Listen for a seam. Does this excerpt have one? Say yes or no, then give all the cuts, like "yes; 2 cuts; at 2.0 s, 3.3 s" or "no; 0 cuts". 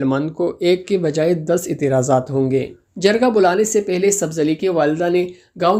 no; 0 cuts